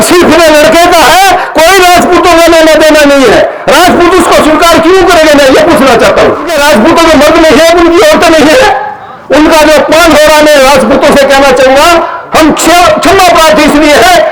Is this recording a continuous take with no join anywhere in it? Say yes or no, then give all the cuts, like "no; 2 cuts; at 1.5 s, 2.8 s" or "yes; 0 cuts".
no; 1 cut; at 6.5 s